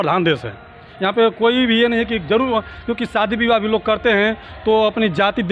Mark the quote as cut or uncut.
uncut